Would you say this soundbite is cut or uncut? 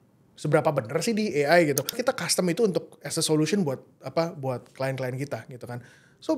cut